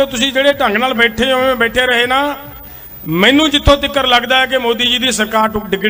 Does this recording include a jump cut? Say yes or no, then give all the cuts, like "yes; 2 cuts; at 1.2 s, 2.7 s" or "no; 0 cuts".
no; 0 cuts